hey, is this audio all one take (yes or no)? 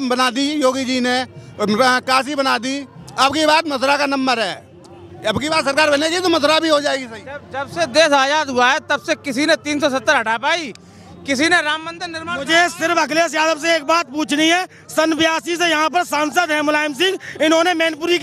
yes